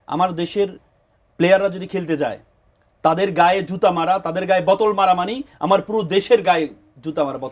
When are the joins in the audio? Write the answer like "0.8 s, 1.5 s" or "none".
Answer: none